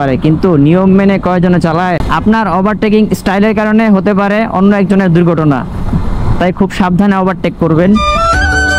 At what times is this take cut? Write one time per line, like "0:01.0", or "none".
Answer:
none